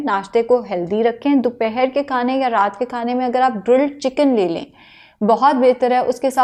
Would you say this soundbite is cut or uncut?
uncut